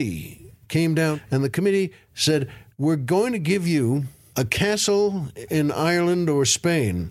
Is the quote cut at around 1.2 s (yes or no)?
yes